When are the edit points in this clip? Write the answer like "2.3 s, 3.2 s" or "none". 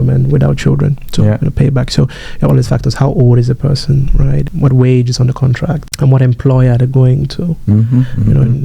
none